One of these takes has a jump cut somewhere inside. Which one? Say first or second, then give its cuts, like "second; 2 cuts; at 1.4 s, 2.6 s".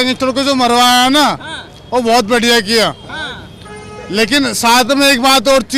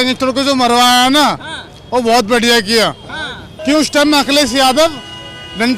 second; 1 cut; at 3.4 s